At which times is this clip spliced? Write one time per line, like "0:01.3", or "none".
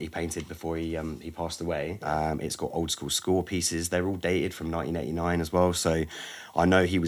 0:02.0